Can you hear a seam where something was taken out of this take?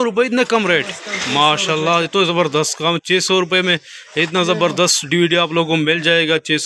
no; 0 cuts

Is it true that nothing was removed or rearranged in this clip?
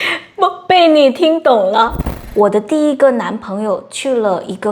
no; 1 cut; at 2.0 s

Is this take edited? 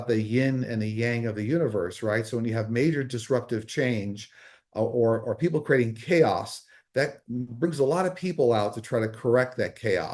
no; 0 cuts

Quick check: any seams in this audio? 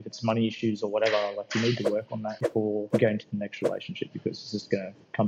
yes; 1 cut; at 2.6 s

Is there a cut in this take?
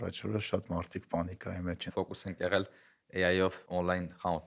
yes; 2 cuts; at 1.9 s, 3.6 s

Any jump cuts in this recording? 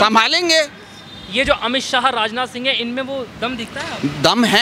no; 0 cuts

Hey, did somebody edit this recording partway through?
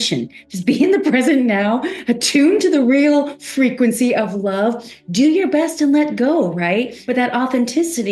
yes; 1 cut; at 7.0 s

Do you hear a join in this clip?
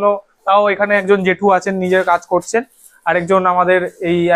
no; 0 cuts

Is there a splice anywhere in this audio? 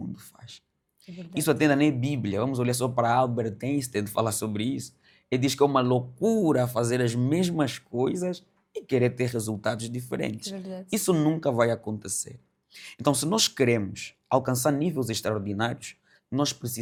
no; 0 cuts

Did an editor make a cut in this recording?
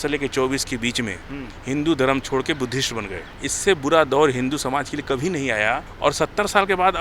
yes; 2 cuts; at 3.2 s, 5.9 s

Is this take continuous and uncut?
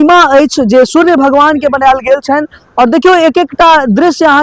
yes; 0 cuts

